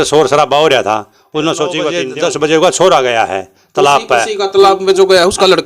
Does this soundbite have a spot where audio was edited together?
yes; 1 cut; at 2.0 s

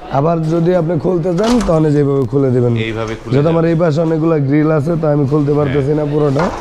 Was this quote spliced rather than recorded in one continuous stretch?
no; 0 cuts

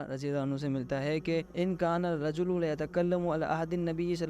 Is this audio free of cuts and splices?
no; 1 cut; at 1.5 s

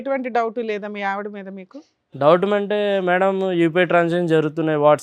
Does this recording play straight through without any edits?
yes; 0 cuts

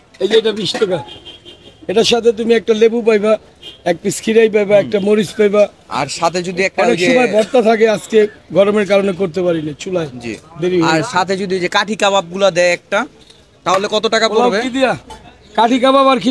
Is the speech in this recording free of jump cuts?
yes; 0 cuts

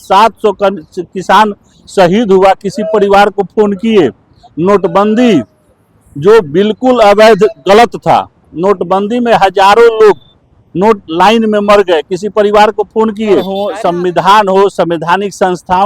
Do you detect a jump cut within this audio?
yes; 1 cut; at 13.6 s

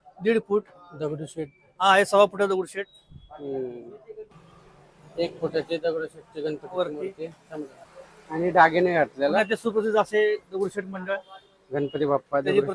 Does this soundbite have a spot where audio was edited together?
no; 0 cuts

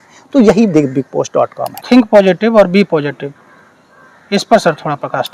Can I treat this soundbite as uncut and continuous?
no; 1 cut; at 1.8 s

